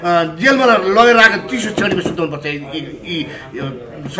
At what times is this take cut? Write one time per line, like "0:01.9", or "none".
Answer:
none